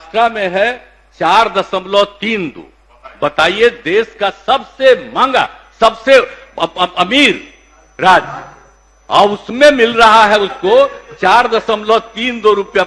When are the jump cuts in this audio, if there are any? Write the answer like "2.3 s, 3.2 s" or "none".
none